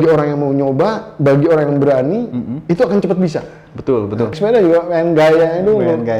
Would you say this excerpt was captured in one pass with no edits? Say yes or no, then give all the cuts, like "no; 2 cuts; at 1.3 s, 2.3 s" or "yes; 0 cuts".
no; 1 cut; at 4.3 s